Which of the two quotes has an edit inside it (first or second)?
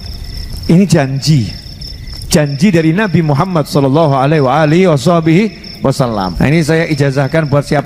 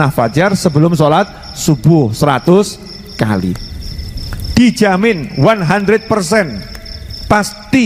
first